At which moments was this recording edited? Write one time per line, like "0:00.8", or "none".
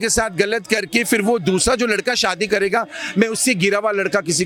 none